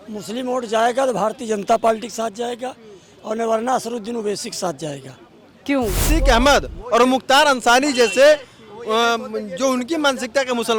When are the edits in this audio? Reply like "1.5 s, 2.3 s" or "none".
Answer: 6.1 s